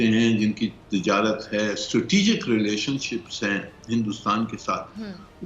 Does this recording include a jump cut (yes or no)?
no